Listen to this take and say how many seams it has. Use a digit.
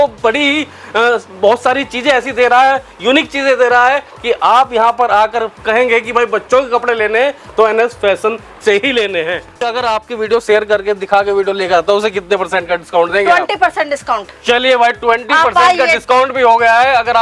1